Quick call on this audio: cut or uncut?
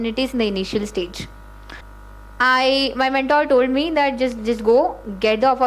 cut